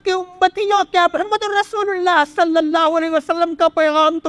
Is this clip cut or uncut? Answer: uncut